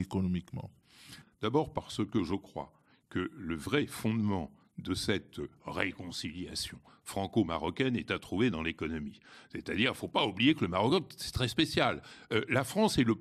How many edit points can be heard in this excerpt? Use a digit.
1